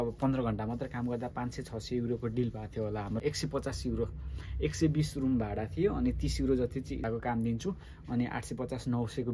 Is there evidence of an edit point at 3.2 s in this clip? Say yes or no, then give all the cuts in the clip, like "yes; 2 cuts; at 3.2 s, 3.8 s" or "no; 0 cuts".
yes; 2 cuts; at 3.2 s, 7.0 s